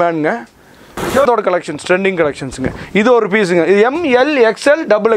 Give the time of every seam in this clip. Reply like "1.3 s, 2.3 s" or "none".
1.2 s